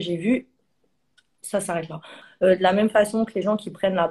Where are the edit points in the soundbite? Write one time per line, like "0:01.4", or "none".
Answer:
0:02.2